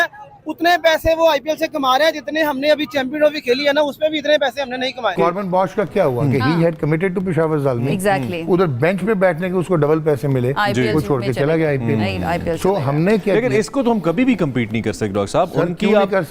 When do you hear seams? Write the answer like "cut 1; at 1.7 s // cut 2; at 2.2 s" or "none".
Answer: cut 1; at 5.1 s